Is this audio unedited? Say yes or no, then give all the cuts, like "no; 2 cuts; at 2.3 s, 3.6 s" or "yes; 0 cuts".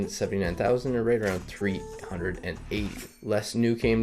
no; 1 cut; at 3.1 s